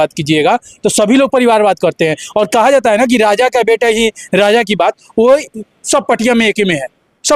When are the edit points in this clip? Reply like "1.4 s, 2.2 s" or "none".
none